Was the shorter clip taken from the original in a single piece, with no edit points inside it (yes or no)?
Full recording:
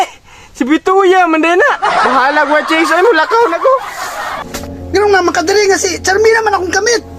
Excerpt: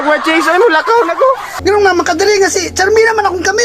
no